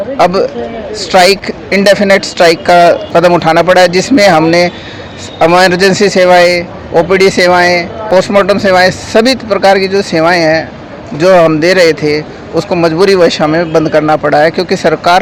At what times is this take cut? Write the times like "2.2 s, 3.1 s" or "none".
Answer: none